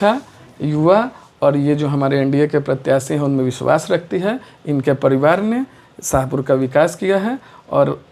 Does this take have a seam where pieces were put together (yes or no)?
no